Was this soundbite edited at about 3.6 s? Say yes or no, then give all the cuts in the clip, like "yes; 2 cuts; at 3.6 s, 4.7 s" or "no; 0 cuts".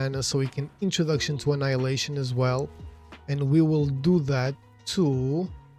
no; 0 cuts